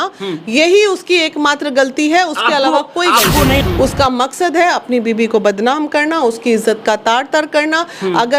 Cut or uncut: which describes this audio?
cut